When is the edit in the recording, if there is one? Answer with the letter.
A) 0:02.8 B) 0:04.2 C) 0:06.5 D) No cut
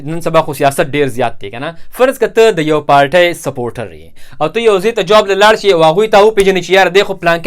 B